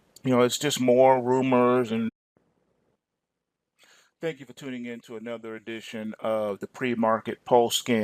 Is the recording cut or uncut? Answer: uncut